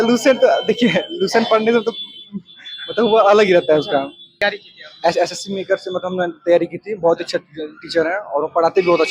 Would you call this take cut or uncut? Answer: cut